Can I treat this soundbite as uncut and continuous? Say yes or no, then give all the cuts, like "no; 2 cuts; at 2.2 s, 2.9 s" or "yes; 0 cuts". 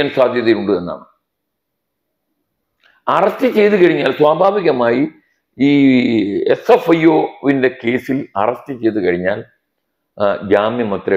yes; 0 cuts